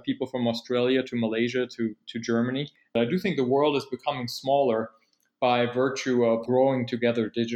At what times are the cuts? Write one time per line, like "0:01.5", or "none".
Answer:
0:03.0
0:06.4